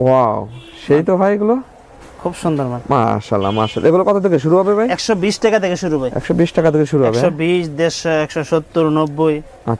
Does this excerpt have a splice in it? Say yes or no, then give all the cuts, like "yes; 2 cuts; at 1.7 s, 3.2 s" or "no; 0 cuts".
no; 0 cuts